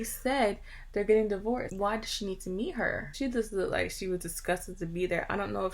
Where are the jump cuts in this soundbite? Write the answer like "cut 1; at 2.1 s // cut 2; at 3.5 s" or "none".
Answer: cut 1; at 1.7 s // cut 2; at 3.1 s